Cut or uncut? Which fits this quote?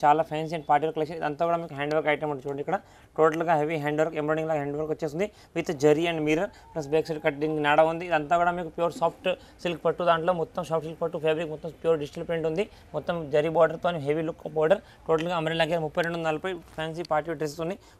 uncut